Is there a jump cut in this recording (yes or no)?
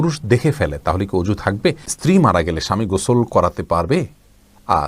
yes